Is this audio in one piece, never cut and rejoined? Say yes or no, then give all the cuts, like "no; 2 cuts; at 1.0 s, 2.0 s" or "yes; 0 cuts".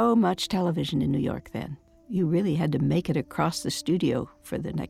no; 1 cut; at 1.9 s